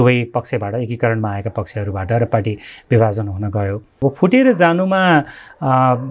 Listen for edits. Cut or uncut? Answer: cut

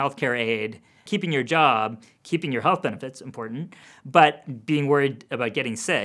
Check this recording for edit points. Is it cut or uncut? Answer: cut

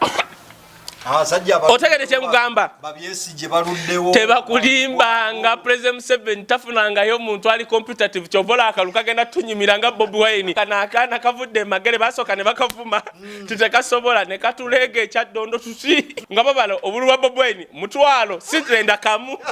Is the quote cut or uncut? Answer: cut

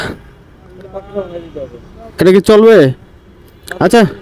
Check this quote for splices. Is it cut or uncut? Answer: uncut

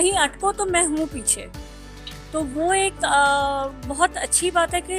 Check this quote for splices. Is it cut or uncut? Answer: uncut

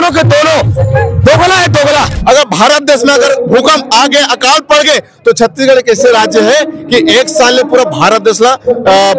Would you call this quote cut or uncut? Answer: cut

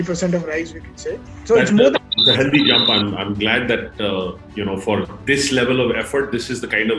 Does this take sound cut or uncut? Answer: cut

